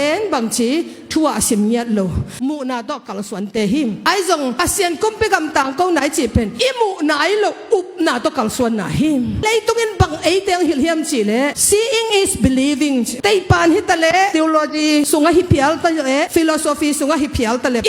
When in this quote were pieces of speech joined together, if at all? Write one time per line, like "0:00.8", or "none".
0:02.4
0:09.4
0:13.1
0:15.1

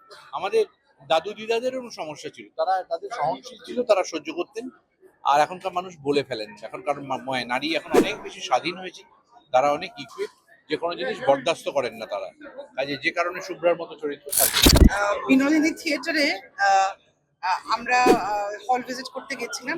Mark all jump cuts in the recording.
0:14.7

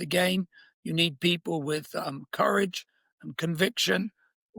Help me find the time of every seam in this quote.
none

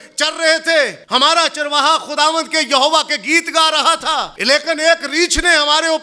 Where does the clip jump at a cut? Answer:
0:01.0
0:04.3

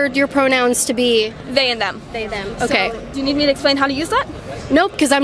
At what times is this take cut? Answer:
none

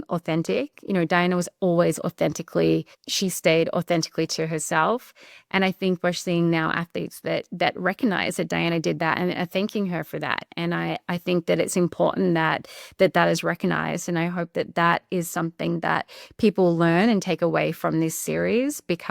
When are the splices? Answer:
none

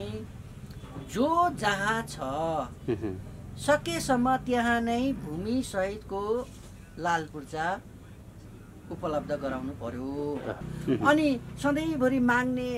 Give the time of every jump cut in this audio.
0:10.7

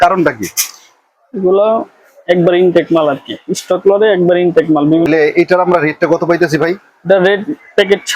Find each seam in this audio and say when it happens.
0:05.1

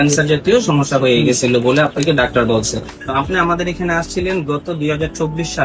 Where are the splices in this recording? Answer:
0:03.0

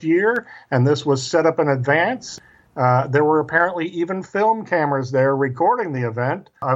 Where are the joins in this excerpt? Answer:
0:02.2

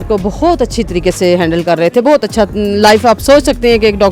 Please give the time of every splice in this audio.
none

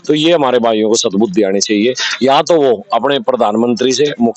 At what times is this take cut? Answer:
none

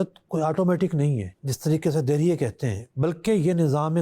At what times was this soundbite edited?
0:01.4

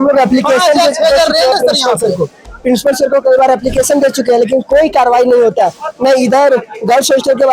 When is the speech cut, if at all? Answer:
none

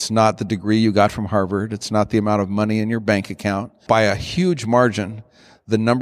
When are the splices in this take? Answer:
0:03.7

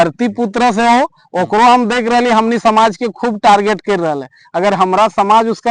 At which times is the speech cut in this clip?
none

